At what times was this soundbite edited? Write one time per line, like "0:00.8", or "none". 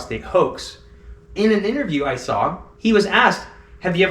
0:01.3

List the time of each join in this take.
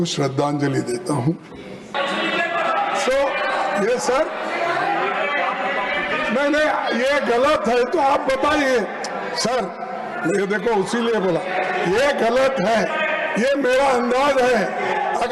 0:01.9

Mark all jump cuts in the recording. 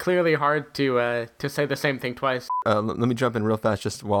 0:02.5

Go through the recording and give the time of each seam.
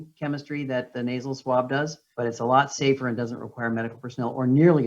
none

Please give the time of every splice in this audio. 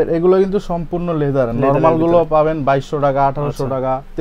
none

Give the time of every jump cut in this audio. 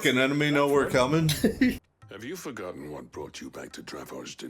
0:01.8

